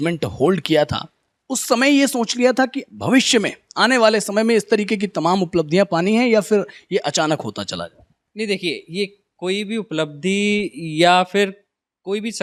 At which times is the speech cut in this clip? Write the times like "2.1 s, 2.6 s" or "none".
none